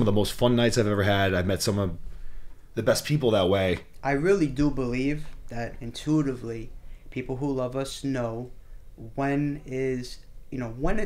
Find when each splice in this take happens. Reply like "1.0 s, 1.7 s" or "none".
3.9 s